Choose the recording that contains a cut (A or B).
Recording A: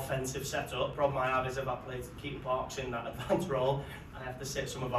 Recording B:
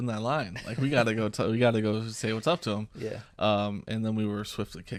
A